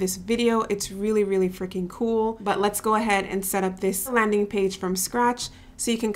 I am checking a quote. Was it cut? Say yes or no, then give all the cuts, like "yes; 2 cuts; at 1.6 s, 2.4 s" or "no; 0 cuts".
yes; 2 cuts; at 2.4 s, 4.1 s